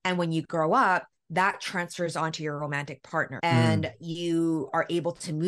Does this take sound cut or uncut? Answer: uncut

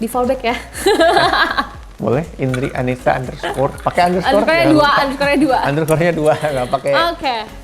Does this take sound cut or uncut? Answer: uncut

